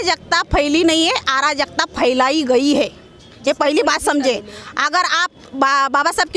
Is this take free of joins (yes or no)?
yes